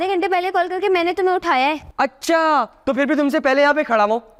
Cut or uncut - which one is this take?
uncut